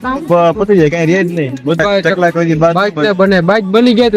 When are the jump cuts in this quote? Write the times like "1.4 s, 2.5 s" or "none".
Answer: 1.8 s

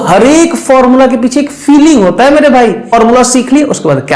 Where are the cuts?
2.9 s

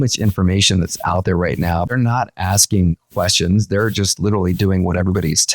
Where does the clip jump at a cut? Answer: 1.9 s

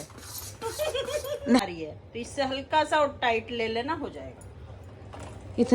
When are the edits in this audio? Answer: 1.6 s

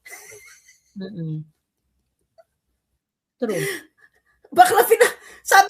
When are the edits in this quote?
none

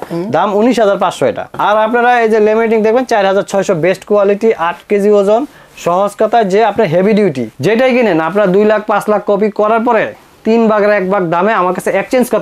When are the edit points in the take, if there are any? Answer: 1.5 s, 7.5 s

